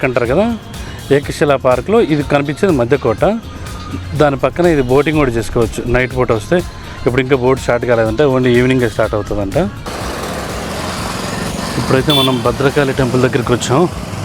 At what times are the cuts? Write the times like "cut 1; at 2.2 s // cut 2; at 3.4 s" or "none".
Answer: cut 1; at 9.9 s